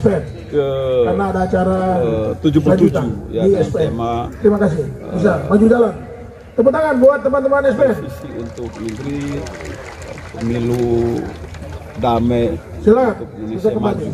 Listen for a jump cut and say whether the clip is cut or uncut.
uncut